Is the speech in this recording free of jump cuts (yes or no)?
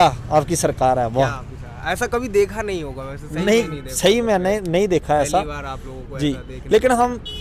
yes